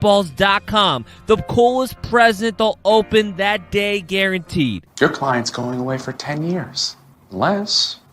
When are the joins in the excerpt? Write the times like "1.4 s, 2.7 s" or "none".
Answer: 4.8 s